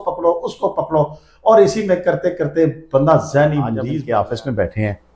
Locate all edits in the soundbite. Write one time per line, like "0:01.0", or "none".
0:03.8